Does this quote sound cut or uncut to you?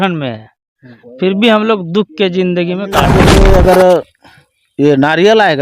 cut